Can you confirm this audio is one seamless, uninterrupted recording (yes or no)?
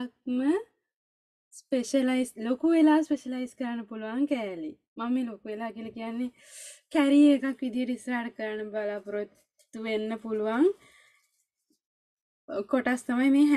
yes